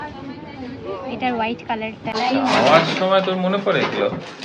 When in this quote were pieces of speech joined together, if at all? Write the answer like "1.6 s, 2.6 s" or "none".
2.1 s